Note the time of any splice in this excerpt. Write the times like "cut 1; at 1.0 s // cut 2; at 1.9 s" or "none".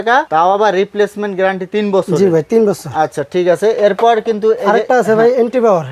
none